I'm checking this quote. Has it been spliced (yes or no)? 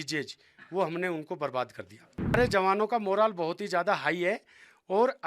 yes